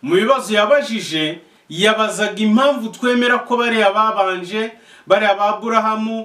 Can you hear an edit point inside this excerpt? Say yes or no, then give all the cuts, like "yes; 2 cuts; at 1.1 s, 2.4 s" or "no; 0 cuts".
no; 0 cuts